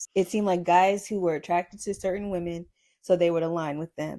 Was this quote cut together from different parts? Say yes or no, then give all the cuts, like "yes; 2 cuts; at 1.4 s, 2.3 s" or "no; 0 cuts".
no; 0 cuts